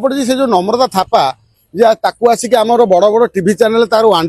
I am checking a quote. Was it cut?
no; 0 cuts

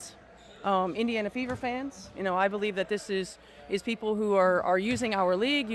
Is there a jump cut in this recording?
no; 0 cuts

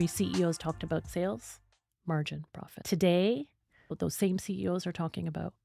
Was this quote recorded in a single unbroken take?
no; 3 cuts; at 1.1 s, 2.7 s, 3.9 s

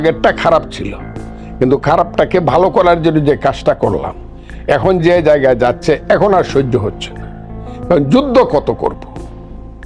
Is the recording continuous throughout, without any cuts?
no; 1 cut; at 9.0 s

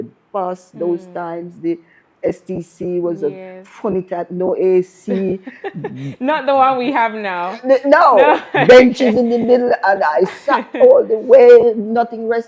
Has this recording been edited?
no; 0 cuts

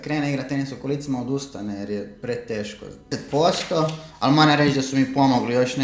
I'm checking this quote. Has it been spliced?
yes; 1 cut; at 3.1 s

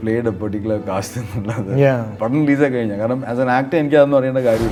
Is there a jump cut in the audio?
no; 0 cuts

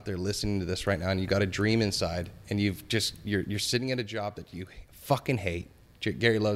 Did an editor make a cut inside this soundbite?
no; 0 cuts

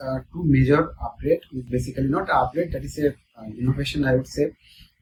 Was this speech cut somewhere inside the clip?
no; 0 cuts

